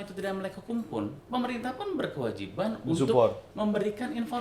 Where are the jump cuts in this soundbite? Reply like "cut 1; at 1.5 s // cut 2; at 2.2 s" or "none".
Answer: cut 1; at 1.2 s // cut 2; at 3.5 s